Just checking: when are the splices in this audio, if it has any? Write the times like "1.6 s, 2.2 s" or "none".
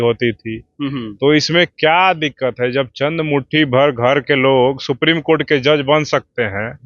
none